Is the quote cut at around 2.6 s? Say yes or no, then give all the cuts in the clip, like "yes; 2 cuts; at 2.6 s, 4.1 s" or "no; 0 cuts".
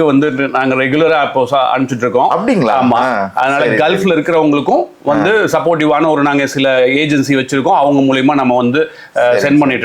no; 0 cuts